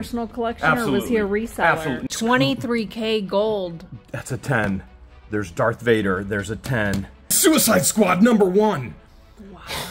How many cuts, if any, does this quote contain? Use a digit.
2